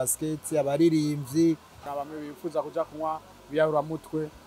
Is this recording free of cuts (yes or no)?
no